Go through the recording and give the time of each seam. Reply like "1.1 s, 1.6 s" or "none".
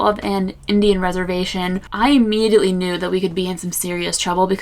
1.8 s